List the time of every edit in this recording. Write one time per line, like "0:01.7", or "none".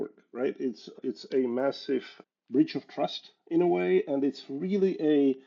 0:00.9
0:02.2